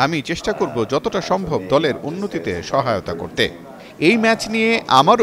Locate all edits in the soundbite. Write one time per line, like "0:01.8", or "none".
0:03.8